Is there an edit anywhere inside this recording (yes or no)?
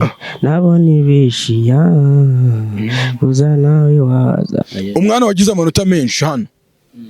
yes